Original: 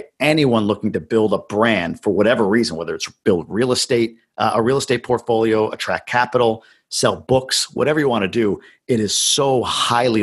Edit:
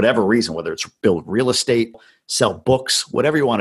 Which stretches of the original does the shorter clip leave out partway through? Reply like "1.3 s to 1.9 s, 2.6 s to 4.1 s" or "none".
4.3 s to 6.7 s